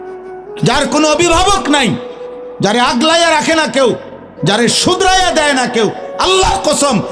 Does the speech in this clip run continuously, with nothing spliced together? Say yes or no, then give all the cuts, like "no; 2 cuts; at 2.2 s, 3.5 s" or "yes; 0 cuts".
yes; 0 cuts